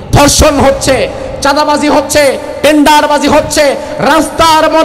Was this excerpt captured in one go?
yes; 0 cuts

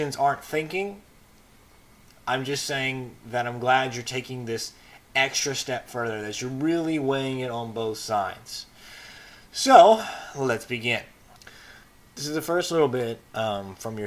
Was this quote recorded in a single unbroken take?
yes; 0 cuts

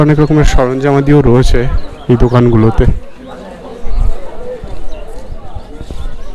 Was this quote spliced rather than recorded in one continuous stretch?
no; 0 cuts

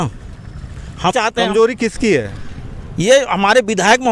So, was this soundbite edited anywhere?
yes; 1 cut; at 1.1 s

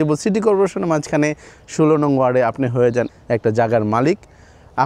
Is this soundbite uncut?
no; 1 cut; at 3.1 s

